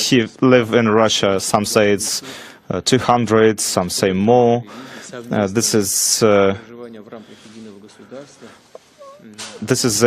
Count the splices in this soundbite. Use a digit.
0